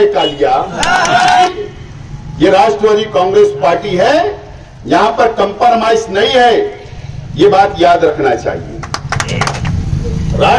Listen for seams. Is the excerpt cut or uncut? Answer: cut